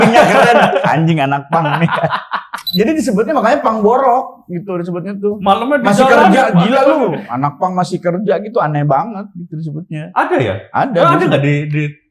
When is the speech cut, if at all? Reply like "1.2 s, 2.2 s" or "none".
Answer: 2.6 s